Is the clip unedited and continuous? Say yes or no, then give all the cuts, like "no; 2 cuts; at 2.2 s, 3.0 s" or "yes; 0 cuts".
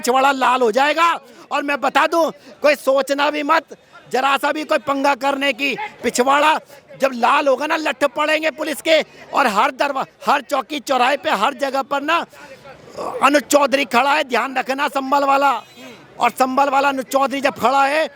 yes; 0 cuts